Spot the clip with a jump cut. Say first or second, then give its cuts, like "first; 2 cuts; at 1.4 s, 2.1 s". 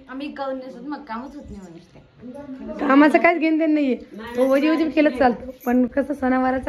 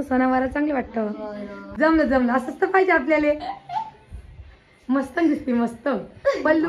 second; 1 cut; at 1.6 s